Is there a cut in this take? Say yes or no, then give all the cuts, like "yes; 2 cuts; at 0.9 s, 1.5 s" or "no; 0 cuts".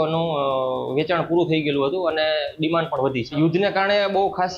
yes; 1 cut; at 3.3 s